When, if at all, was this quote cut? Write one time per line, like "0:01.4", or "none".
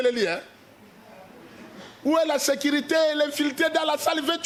none